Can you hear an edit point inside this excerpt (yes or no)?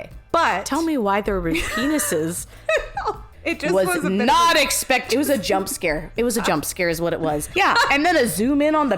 yes